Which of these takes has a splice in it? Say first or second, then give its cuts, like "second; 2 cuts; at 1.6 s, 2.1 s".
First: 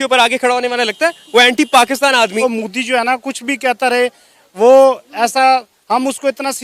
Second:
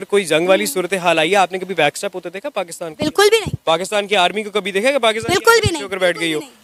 first; 1 cut; at 2.4 s